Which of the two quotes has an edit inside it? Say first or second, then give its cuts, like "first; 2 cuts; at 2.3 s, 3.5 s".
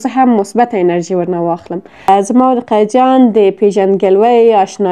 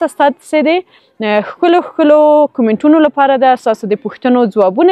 first; 1 cut; at 2.1 s